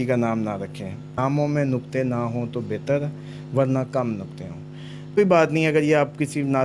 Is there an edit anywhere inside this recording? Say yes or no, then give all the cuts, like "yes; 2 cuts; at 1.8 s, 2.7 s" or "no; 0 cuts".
yes; 2 cuts; at 1.1 s, 5.2 s